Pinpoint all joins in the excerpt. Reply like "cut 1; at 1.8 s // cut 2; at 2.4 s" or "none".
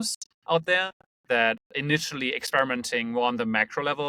none